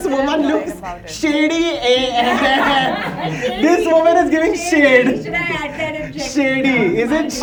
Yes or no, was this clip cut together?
no